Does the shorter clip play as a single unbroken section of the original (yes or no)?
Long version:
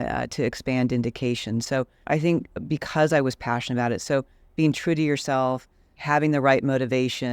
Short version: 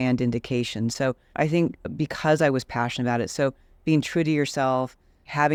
yes